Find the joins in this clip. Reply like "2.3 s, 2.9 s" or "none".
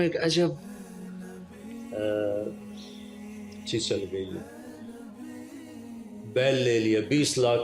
none

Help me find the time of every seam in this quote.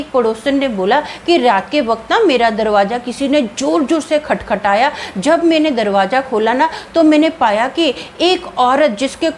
none

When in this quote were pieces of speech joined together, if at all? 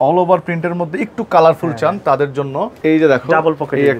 2.8 s

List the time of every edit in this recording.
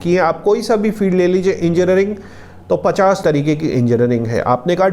3.2 s

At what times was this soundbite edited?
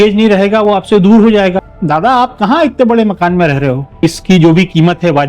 1.6 s, 3.9 s

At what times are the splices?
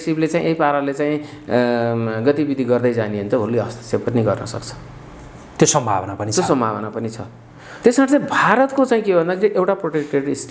none

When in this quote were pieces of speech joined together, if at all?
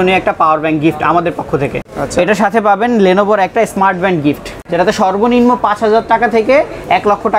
1.8 s, 4.6 s

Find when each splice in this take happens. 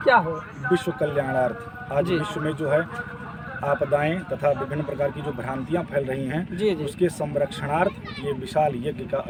none

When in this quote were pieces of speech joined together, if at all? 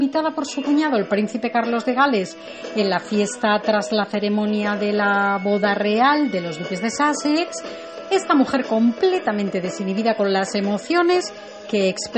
11.2 s

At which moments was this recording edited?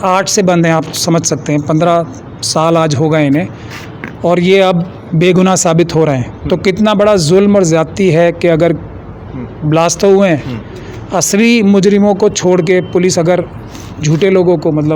none

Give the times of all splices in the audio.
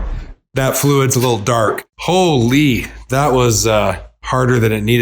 1.9 s

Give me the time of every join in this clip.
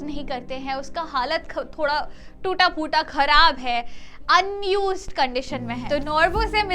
5.8 s

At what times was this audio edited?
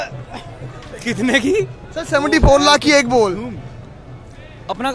none

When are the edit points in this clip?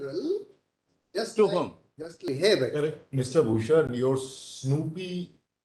2.2 s

